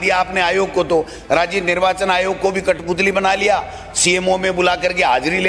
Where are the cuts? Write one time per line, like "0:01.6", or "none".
none